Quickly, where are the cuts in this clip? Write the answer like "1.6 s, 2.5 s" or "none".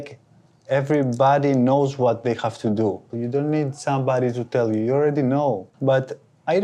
3.1 s, 5.7 s